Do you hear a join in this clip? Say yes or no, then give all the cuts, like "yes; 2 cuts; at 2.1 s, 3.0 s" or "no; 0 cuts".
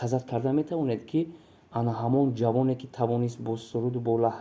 no; 0 cuts